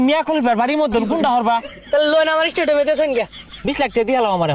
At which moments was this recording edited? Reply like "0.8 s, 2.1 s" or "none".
1.7 s, 3.4 s